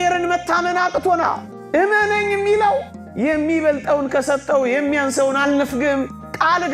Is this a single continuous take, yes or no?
yes